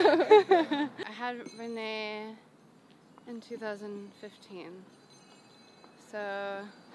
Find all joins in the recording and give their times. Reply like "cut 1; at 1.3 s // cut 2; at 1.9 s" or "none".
cut 1; at 1.0 s